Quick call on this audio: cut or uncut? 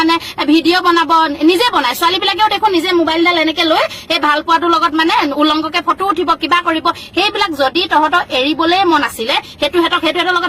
uncut